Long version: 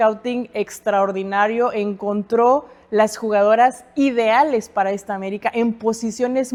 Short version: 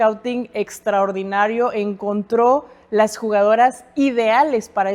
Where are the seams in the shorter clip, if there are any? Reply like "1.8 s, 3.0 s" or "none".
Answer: none